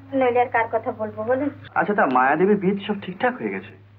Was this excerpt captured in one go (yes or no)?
no